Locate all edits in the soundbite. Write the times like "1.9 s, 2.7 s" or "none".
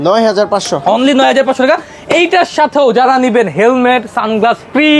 none